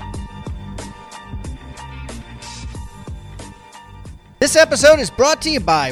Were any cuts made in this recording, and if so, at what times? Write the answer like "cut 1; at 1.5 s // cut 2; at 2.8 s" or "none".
cut 1; at 2.3 s // cut 2; at 4.2 s